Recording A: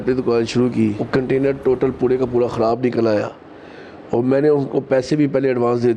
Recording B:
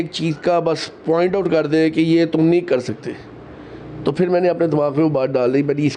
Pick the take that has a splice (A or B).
A